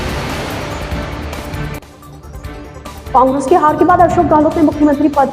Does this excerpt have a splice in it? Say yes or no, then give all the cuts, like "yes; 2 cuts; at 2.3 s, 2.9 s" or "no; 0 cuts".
yes; 1 cut; at 2.8 s